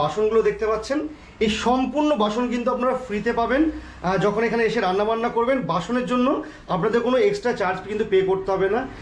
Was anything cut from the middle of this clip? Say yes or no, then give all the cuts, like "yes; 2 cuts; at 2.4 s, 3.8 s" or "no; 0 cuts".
no; 0 cuts